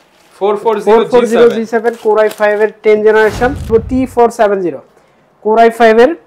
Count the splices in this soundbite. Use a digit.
1